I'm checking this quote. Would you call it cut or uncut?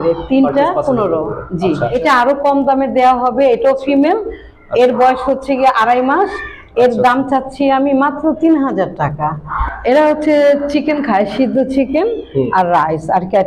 cut